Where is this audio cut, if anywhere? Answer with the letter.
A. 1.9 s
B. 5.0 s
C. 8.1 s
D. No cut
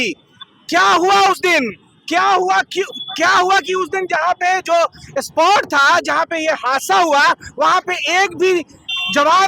D